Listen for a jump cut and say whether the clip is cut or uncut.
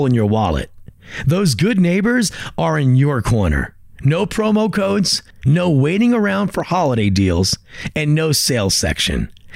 uncut